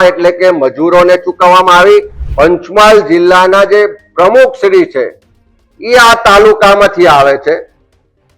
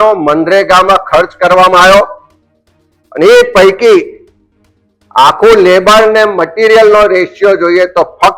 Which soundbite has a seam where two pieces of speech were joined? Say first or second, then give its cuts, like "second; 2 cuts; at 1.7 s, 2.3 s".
first; 1 cut; at 2.2 s